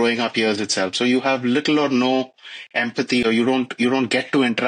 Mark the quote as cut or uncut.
uncut